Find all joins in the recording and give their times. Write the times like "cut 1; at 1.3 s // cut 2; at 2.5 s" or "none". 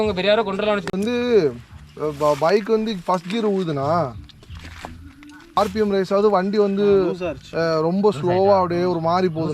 cut 1; at 0.9 s // cut 2; at 5.6 s